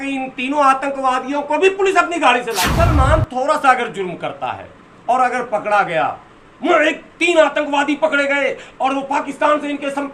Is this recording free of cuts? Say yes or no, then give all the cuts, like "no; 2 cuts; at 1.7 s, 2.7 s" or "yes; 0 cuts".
no; 1 cut; at 2.7 s